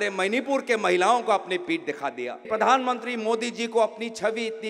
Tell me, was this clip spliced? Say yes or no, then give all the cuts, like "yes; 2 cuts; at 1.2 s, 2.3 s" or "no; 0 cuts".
yes; 1 cut; at 2.4 s